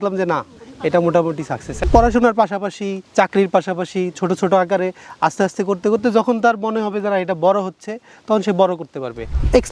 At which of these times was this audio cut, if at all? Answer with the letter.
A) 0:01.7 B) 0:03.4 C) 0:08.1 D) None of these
A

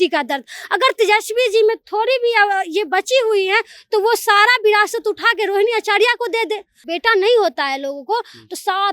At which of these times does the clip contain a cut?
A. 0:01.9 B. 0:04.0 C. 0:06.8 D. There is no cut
C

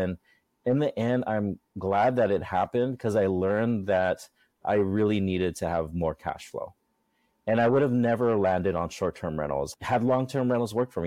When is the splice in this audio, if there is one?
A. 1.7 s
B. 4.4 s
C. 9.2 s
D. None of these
A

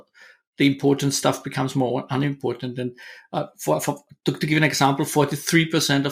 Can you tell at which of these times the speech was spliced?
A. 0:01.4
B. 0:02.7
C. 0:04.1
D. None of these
D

